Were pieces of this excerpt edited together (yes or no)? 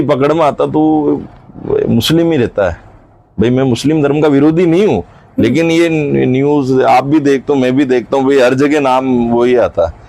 no